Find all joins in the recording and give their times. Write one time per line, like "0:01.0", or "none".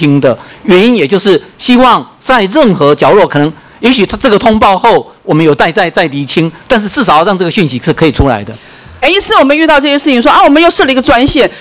0:09.0